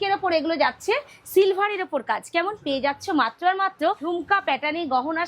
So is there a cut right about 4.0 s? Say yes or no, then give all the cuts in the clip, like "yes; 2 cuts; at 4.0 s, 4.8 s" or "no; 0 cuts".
yes; 1 cut; at 4.0 s